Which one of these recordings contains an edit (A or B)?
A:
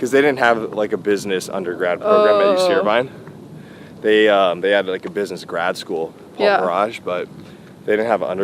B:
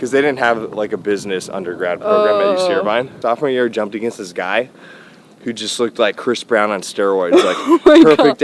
B